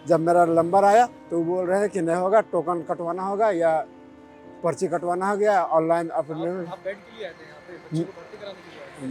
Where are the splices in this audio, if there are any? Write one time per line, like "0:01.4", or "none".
none